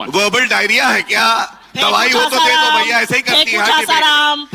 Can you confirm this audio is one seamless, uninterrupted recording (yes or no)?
yes